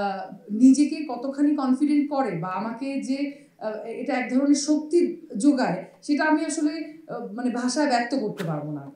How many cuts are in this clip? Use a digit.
0